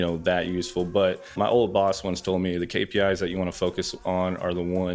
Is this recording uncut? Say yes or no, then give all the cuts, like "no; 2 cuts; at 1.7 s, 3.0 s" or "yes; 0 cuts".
no; 1 cut; at 1.3 s